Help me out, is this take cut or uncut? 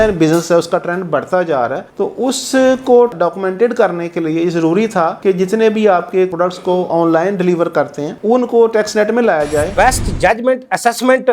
cut